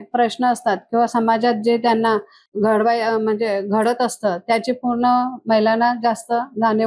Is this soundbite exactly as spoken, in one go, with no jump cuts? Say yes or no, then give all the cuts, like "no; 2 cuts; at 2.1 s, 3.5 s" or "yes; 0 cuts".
yes; 0 cuts